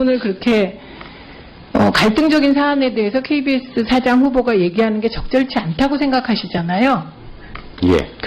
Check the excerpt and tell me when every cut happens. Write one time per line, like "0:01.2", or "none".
0:03.1